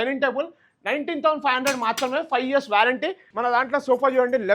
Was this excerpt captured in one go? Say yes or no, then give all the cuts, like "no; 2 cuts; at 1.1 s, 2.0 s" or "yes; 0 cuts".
no; 1 cut; at 3.2 s